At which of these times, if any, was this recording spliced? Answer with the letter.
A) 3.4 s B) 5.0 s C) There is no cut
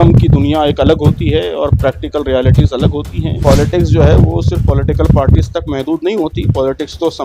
A